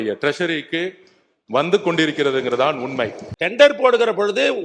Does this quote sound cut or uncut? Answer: cut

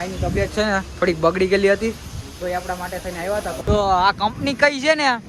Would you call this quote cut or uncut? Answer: cut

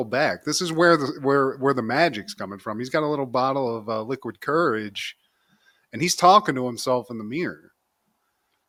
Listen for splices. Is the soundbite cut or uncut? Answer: uncut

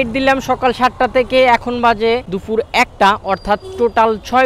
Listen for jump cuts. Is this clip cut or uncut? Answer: cut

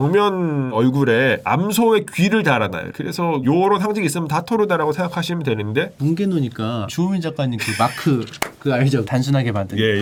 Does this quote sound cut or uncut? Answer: uncut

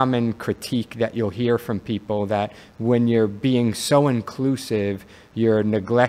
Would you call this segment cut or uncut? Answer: uncut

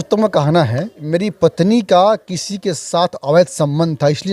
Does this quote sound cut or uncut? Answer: cut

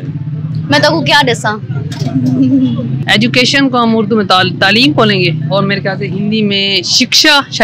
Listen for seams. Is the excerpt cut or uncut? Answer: cut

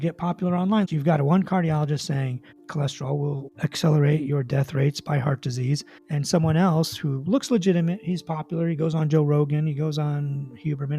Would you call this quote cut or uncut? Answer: cut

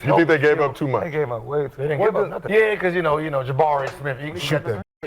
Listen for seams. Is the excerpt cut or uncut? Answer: cut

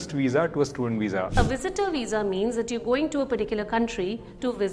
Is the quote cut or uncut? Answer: cut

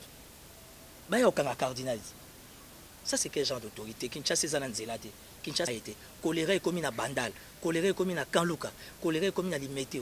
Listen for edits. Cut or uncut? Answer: cut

